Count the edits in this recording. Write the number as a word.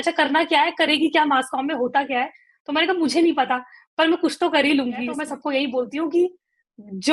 one